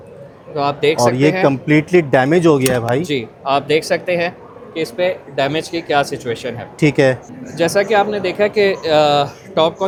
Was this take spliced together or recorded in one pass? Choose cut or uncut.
uncut